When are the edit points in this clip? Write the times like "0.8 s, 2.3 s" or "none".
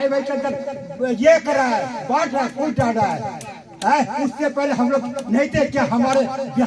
none